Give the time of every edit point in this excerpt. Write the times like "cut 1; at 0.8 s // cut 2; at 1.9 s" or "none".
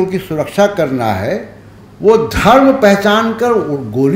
none

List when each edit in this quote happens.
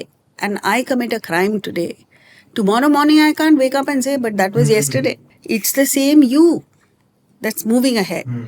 cut 1; at 5.3 s

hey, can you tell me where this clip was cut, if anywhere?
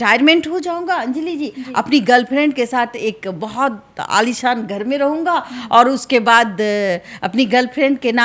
none

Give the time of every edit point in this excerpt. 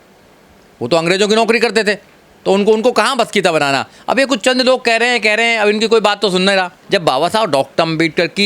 cut 1; at 6.8 s

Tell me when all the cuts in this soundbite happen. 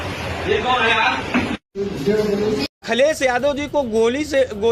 cut 1; at 3.0 s

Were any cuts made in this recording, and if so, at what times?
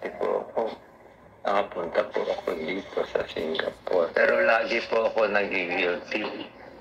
none

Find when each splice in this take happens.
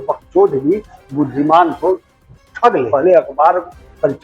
cut 1; at 2.9 s

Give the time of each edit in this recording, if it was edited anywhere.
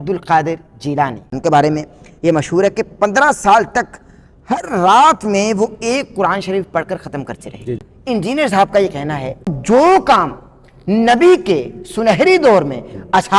cut 1; at 1.3 s // cut 2; at 7.9 s // cut 3; at 9.6 s

